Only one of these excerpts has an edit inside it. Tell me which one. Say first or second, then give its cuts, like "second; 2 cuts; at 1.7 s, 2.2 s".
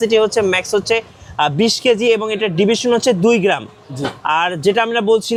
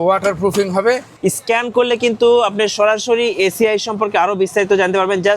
second; 1 cut; at 1.1 s